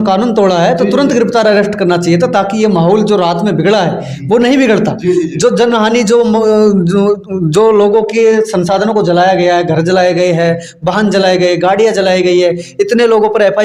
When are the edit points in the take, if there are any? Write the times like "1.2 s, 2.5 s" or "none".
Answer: none